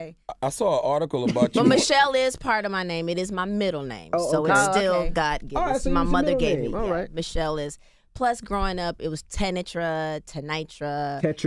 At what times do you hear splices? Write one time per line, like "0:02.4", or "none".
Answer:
0:05.9